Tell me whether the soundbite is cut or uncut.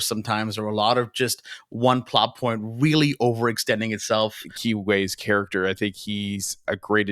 cut